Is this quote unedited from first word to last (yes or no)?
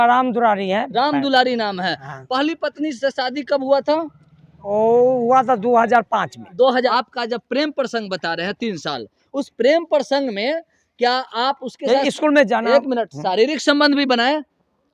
no